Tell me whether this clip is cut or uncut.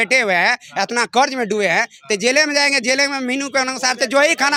uncut